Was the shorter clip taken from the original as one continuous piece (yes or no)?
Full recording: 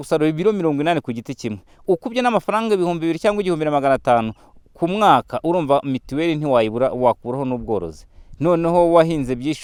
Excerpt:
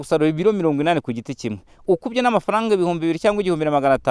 yes